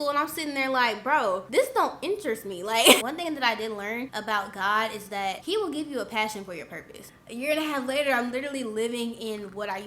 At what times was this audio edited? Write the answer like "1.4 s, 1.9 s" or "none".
1.4 s, 3.0 s, 4.1 s, 5.4 s, 7.2 s